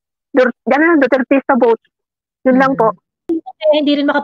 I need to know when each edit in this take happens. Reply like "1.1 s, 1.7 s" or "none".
3.2 s